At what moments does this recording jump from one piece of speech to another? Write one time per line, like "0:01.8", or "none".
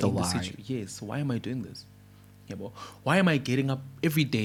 none